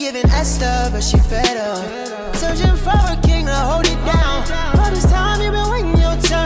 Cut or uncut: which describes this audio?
uncut